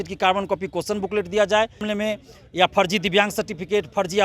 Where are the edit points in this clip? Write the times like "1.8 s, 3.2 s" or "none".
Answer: 1.8 s